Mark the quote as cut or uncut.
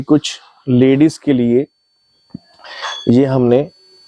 uncut